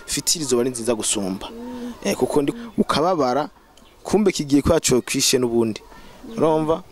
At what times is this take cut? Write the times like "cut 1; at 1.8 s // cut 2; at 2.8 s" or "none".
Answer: cut 1; at 2.5 s